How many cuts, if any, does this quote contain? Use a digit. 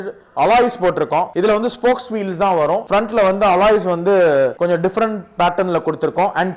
3